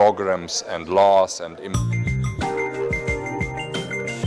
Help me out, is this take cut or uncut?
cut